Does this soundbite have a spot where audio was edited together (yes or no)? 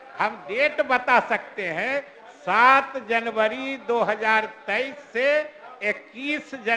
no